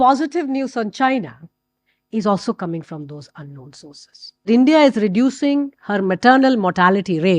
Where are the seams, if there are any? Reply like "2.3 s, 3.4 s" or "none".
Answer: 4.5 s